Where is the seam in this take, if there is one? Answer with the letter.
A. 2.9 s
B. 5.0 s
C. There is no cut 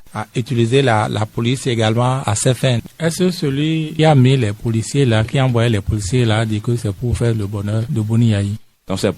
A